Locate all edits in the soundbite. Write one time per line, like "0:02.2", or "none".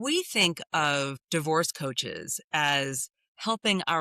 0:01.2